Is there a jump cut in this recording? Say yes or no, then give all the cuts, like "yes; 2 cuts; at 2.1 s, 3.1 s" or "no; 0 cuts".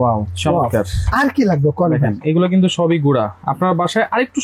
no; 0 cuts